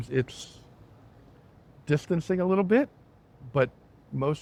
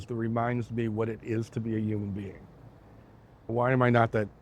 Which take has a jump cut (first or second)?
second